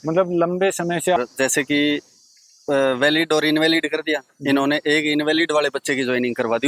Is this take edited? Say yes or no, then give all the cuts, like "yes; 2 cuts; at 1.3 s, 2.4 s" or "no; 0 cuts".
yes; 1 cut; at 1.2 s